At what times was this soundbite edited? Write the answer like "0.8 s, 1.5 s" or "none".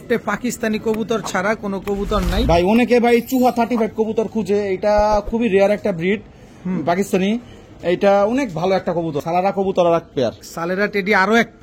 2.4 s, 9.2 s